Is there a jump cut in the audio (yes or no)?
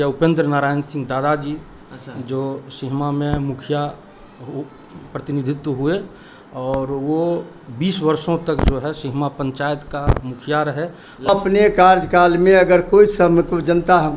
yes